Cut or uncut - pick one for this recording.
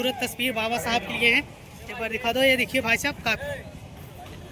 uncut